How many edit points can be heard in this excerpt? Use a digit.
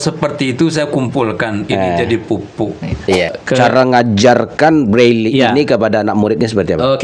1